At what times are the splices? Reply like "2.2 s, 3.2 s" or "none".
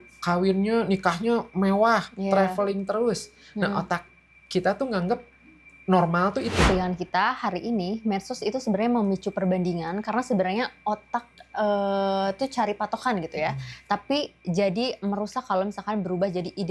6.7 s